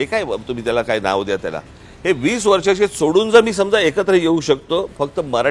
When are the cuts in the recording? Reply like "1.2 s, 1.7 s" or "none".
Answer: none